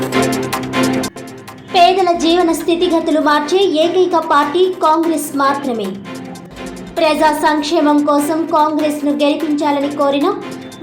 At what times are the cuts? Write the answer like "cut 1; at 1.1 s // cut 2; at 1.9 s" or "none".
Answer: cut 1; at 1.0 s